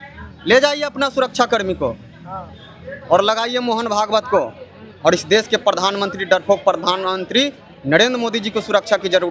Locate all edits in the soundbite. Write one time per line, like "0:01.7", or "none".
none